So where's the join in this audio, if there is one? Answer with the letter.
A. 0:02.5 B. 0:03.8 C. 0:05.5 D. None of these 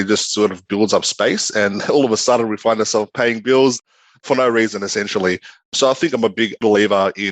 B